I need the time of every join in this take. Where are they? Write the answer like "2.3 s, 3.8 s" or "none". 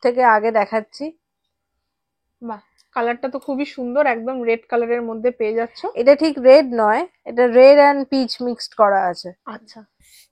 none

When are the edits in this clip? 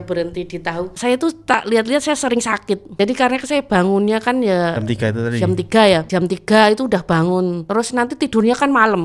0.9 s, 3.0 s, 6.1 s, 7.6 s

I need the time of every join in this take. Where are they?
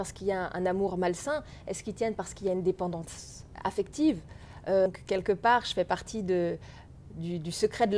4.9 s

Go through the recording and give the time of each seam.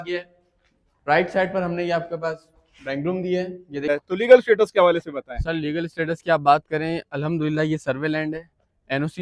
3.9 s

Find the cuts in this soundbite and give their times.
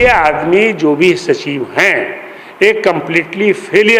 none

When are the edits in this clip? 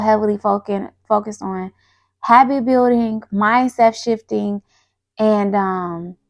none

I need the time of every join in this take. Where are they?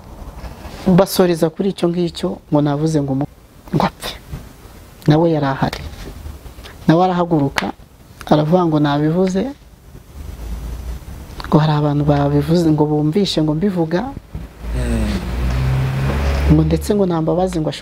3.3 s

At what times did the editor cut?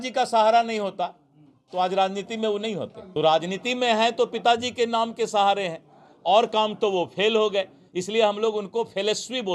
3.0 s

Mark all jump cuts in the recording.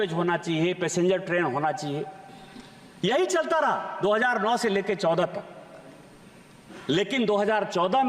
none

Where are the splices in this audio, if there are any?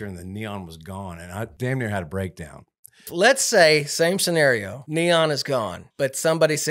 1.5 s, 3.1 s, 4.8 s, 5.8 s

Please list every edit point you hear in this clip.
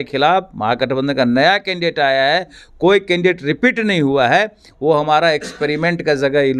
none

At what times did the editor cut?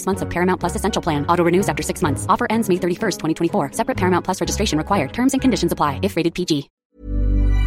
6.7 s

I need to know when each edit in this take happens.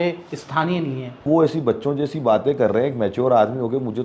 1.2 s

